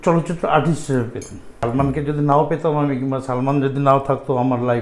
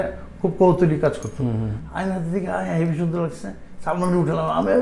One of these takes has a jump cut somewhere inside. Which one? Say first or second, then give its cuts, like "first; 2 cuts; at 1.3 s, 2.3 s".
first; 1 cut; at 1.6 s